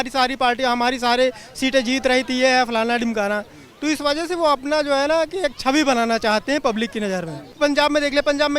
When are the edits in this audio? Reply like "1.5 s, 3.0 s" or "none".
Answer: 7.5 s